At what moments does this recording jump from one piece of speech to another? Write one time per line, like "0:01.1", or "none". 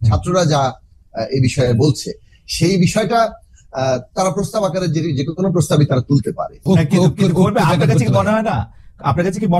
0:06.6